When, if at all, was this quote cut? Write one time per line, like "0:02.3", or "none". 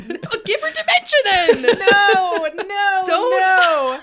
none

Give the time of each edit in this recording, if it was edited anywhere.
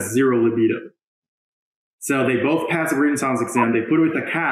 none

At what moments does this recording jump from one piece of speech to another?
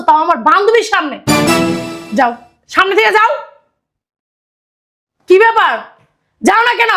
none

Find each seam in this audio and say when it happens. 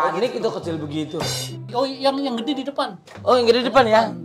0:01.4

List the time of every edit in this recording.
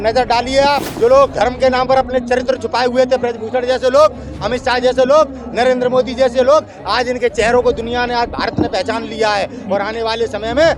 0:00.9

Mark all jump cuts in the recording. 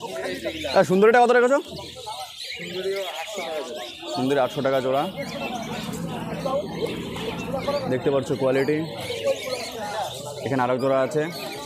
none

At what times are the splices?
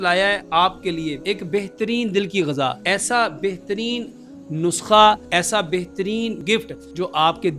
0:01.2
0:02.8
0:06.4

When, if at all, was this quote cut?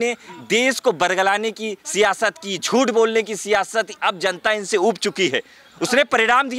none

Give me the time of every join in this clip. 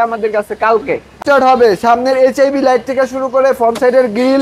0:01.2

